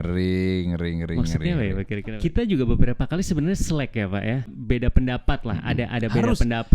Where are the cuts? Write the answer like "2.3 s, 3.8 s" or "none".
2.0 s, 4.5 s